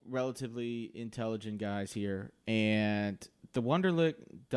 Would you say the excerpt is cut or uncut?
uncut